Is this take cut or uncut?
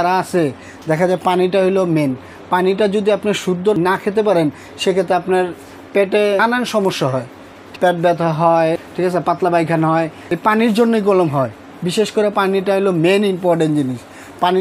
cut